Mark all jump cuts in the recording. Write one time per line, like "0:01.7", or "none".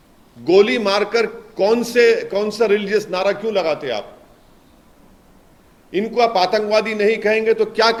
none